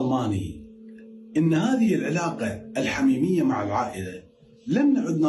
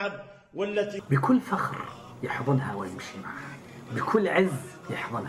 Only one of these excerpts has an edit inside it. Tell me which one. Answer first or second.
second